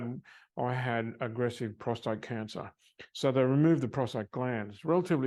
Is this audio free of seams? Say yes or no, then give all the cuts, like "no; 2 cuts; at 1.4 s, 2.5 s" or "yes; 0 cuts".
yes; 0 cuts